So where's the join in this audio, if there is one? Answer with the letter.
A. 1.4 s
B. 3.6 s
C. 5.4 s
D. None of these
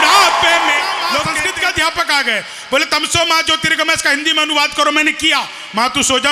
A